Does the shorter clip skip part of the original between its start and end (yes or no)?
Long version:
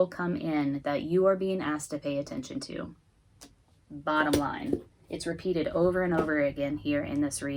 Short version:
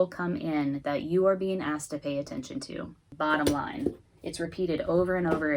yes